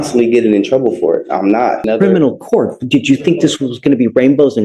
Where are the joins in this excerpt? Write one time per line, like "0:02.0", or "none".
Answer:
0:01.8